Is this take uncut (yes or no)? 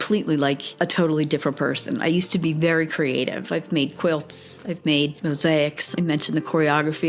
yes